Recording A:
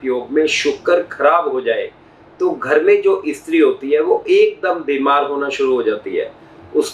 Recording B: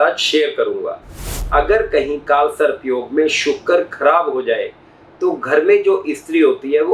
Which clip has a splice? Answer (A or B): B